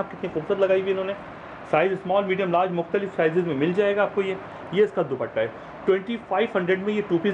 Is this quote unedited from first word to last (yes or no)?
yes